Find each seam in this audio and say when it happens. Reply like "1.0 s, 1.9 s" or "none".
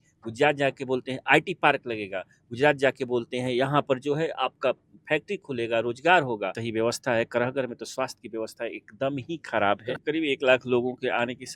6.6 s, 10.0 s